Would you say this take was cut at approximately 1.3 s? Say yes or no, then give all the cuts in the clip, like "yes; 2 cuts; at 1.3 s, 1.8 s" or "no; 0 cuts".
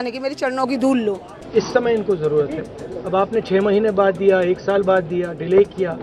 yes; 1 cut; at 1.3 s